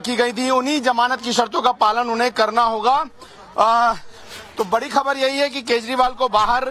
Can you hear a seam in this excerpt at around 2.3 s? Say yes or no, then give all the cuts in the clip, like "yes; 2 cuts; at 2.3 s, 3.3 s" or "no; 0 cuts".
yes; 1 cut; at 2.3 s